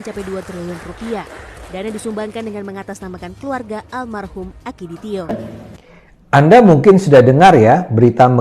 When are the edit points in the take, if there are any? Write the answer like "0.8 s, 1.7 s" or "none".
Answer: 5.3 s